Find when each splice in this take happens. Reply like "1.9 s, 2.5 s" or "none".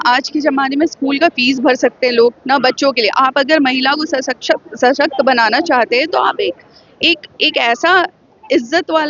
none